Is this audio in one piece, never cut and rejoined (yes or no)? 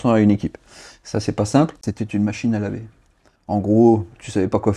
no